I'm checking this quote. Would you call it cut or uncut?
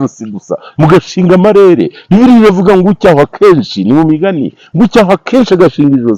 uncut